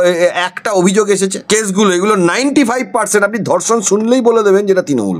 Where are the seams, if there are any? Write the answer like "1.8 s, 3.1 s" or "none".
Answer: 1.4 s